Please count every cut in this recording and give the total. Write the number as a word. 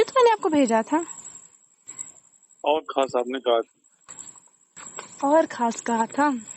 one